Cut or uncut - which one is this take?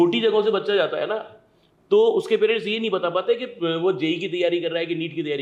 uncut